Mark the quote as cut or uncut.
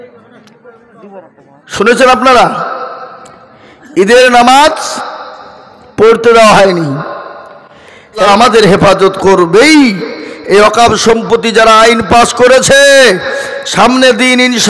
cut